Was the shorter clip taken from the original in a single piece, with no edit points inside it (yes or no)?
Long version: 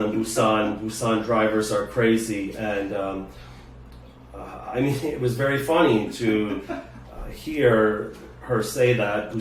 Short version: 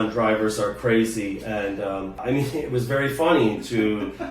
no